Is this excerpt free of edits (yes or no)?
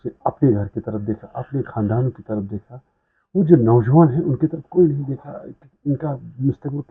yes